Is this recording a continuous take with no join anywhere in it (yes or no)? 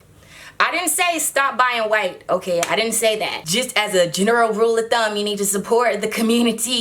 no